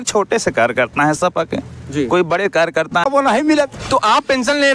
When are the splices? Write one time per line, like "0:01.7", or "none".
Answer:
0:03.0